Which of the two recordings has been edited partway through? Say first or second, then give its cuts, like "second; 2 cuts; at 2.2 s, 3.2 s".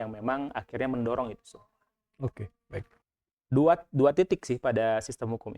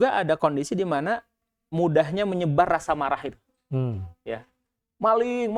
first; 1 cut; at 3.0 s